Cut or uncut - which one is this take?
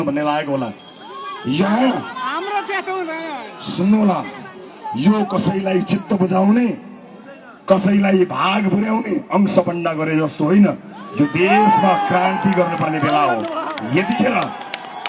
uncut